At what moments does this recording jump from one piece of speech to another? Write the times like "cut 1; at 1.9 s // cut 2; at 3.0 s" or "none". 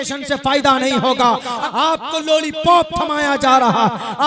cut 1; at 1.6 s